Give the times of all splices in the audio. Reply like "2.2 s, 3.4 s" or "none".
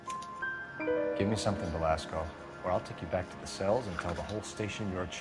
none